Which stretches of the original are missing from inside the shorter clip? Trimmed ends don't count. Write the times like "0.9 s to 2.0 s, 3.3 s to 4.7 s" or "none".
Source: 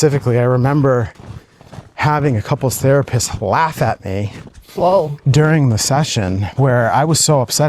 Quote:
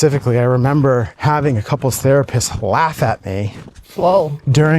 1.1 s to 1.9 s

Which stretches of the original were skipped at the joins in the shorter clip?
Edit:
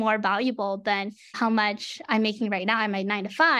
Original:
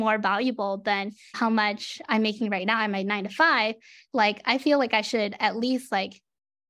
none

